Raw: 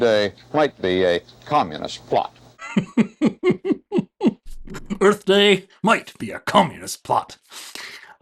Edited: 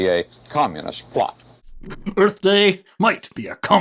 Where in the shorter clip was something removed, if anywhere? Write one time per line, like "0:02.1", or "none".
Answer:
0:01.6